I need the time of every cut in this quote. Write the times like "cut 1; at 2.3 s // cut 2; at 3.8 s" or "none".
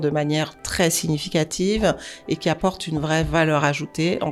none